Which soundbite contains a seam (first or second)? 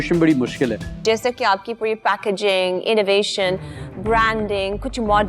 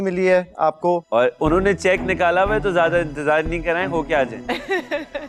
first